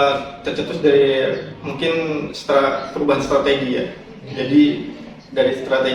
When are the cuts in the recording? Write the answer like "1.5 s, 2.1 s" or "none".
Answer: none